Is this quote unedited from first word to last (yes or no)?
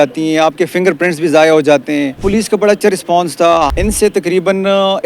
no